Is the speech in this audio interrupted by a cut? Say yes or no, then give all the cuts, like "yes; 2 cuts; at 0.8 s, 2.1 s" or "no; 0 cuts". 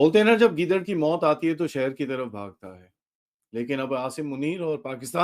no; 0 cuts